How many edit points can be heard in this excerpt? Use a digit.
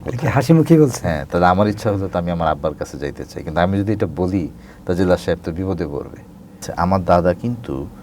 1